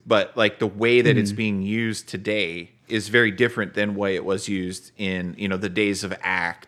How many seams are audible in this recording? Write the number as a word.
one